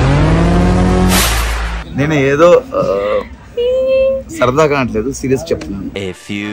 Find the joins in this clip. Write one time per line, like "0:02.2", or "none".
0:01.8